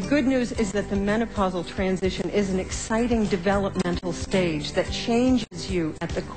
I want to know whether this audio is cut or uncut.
uncut